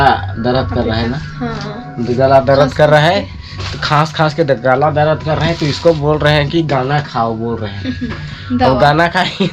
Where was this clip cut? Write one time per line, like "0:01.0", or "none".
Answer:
none

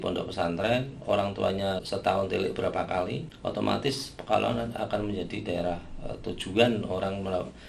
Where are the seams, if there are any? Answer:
0:01.8
0:03.3

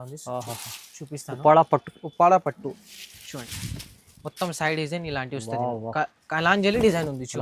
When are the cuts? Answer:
none

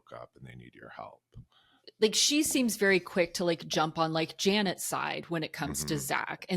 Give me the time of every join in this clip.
0:01.8

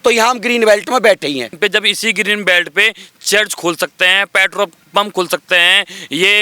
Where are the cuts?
0:01.5

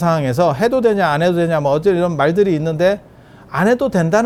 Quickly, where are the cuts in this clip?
none

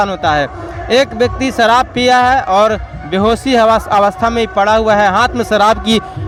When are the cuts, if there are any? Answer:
none

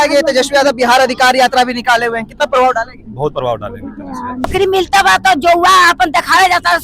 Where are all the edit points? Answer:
0:04.5

